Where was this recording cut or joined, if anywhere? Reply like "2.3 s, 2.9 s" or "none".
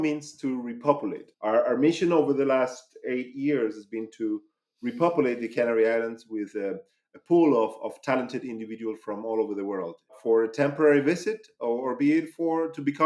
1.3 s, 10.2 s